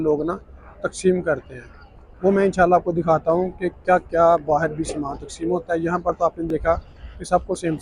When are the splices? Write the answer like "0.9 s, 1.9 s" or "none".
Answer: none